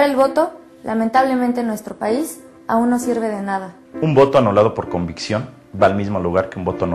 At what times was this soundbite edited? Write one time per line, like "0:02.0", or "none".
0:01.4